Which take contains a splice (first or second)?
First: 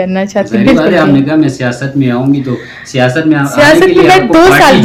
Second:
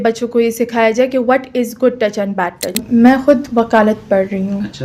second